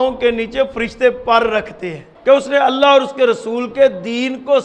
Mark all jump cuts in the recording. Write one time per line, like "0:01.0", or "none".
0:02.1